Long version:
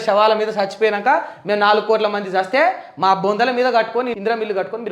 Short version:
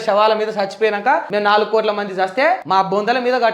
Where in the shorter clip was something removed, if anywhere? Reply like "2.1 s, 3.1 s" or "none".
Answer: 1.3 s, 2.6 s